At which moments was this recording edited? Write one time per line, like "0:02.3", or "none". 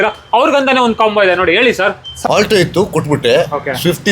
0:02.2